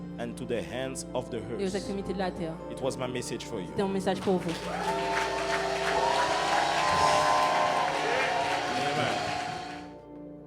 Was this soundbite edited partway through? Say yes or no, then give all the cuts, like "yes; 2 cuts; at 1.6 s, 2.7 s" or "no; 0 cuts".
no; 0 cuts